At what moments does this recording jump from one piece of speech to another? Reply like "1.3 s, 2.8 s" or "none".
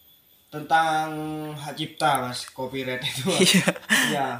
none

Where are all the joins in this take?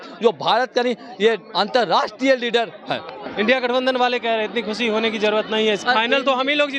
3.2 s

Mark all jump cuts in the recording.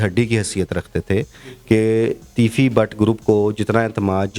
none

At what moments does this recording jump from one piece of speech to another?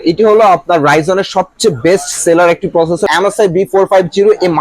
3.1 s

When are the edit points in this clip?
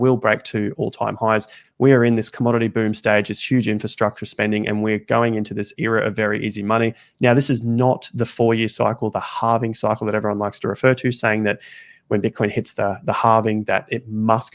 1.6 s, 7.0 s

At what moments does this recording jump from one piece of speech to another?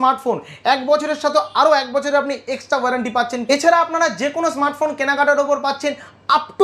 3.4 s

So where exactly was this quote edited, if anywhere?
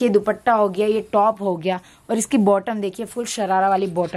none

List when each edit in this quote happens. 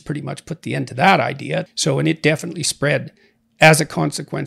1.7 s

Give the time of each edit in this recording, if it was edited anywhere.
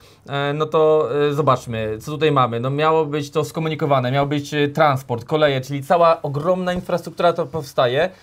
none

